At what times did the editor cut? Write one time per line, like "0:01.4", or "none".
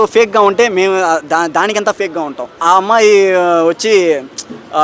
0:02.5